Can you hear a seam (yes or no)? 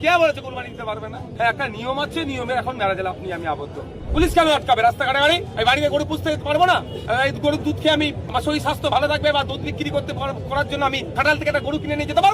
yes